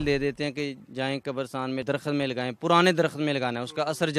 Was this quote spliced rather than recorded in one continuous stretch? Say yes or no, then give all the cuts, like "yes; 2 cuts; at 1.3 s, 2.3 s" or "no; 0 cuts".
no; 0 cuts